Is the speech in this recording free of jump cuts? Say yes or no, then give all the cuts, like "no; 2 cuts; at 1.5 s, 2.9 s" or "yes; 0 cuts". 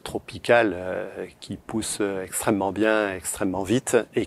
yes; 0 cuts